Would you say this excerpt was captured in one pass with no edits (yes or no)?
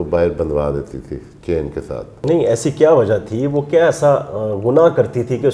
yes